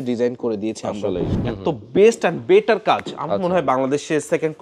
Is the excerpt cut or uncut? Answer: cut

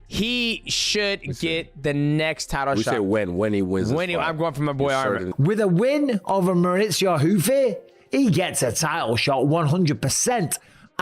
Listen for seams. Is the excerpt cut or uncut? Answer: cut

